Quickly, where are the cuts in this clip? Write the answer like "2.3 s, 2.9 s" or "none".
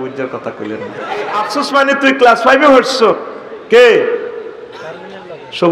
1.4 s

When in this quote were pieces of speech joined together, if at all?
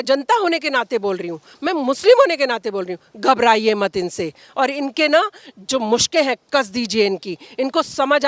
none

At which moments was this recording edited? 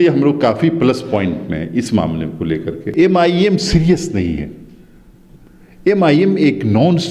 2.9 s

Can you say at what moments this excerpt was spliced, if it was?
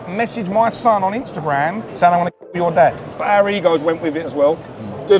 1.8 s, 3.2 s

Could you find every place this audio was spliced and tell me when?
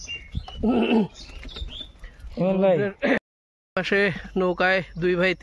3.3 s

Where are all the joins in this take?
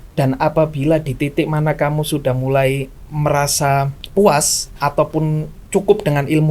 4.0 s

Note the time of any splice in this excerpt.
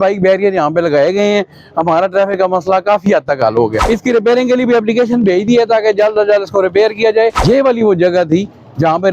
3.8 s, 7.4 s

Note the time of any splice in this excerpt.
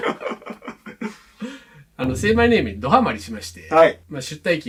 none

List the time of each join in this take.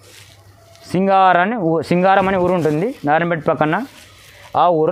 none

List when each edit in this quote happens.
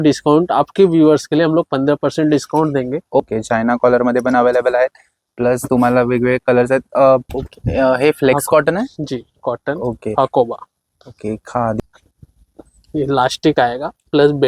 3.2 s, 7.2 s, 11.8 s

